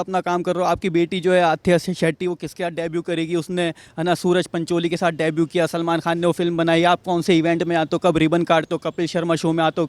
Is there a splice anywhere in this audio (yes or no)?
no